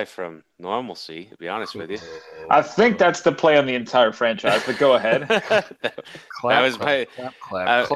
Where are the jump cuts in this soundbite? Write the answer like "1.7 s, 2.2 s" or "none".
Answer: none